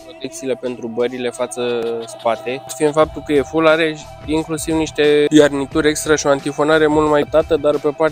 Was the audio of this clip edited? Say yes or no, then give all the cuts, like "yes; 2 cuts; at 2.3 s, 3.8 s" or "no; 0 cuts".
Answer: yes; 3 cuts; at 2.7 s, 5.3 s, 7.3 s